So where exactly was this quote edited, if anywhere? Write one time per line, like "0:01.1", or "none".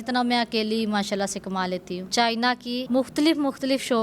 0:02.0
0:02.8